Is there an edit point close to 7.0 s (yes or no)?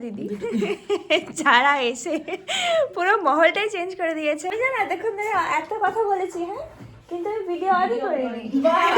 no